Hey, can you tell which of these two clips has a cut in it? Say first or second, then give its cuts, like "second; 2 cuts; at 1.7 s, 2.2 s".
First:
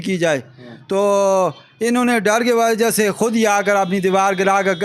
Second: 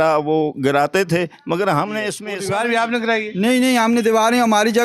second; 1 cut; at 2.3 s